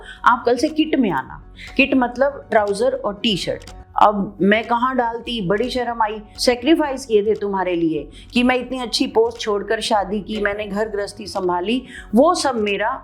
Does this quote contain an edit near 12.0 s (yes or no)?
no